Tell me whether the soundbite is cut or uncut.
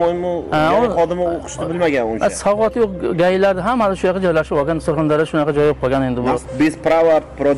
cut